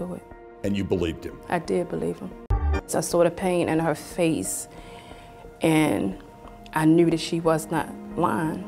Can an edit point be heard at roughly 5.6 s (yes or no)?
no